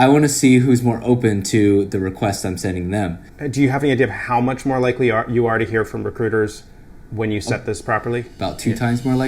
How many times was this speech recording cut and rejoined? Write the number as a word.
two